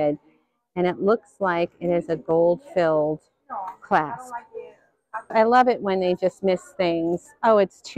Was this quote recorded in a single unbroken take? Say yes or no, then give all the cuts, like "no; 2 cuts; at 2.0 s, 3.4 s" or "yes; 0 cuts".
no; 1 cut; at 5.3 s